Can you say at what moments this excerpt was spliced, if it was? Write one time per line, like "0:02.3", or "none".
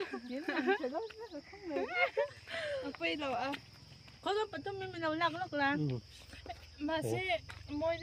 none